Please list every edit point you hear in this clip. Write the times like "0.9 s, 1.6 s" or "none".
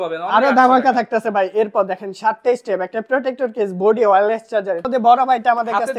4.8 s